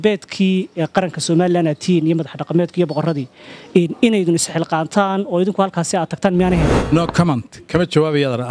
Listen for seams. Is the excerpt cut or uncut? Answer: cut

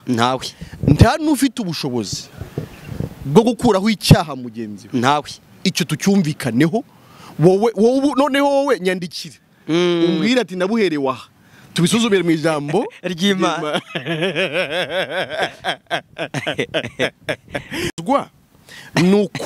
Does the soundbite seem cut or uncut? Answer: uncut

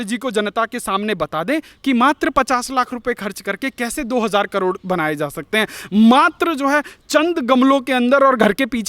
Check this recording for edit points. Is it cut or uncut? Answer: uncut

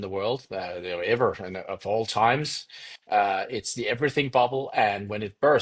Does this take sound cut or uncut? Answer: uncut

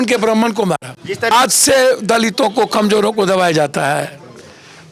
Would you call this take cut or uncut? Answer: cut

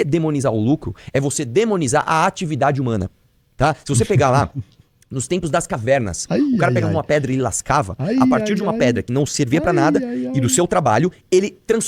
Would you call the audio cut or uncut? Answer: uncut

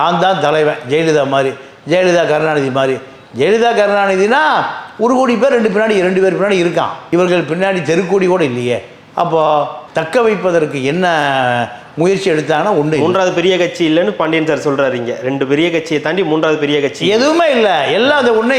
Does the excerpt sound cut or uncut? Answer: uncut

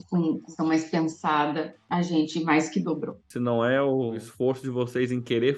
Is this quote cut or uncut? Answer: cut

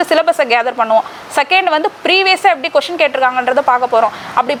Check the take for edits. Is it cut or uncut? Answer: uncut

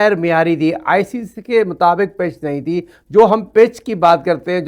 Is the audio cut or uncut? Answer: uncut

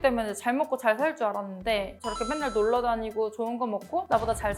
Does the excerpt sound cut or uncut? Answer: cut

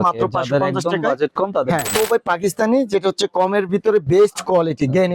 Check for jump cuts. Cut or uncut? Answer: cut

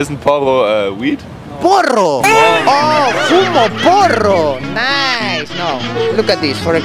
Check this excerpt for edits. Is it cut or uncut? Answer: uncut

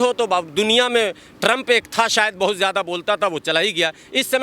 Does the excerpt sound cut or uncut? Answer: uncut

